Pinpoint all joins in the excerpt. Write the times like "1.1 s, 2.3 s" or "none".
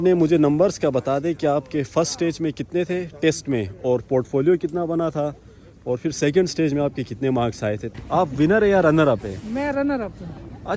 7.8 s